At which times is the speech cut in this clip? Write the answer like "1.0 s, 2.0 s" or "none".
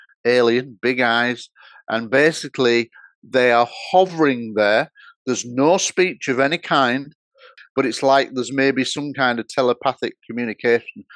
7.5 s